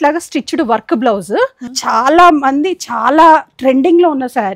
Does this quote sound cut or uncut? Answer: cut